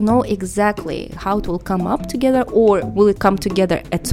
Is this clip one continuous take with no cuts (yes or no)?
no